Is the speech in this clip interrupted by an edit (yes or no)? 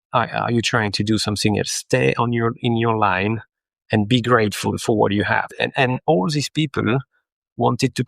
yes